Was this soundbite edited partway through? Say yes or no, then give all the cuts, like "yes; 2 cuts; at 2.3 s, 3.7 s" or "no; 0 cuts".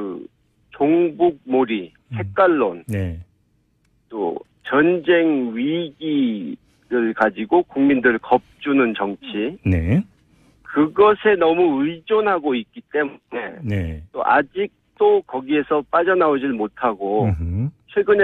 no; 0 cuts